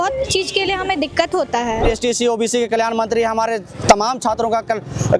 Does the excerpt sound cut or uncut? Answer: cut